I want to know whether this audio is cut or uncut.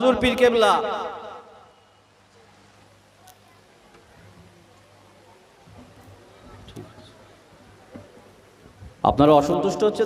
cut